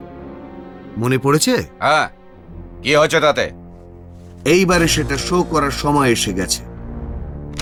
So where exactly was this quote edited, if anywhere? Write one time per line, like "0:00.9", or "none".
none